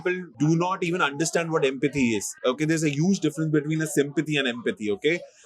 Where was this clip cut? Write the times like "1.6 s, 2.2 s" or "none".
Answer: none